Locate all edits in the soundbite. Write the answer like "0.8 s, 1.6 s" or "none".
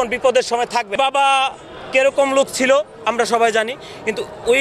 0.9 s